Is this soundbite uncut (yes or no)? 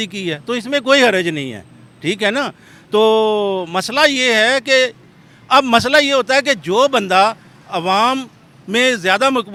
yes